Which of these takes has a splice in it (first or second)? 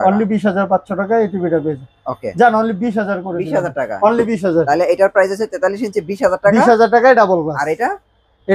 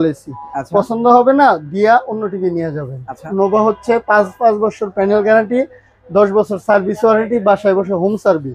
second